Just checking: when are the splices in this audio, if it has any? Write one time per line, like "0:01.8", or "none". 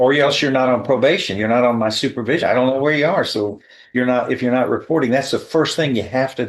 none